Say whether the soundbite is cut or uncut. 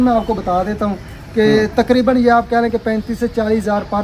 uncut